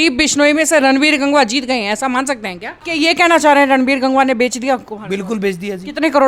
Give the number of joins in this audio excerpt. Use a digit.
1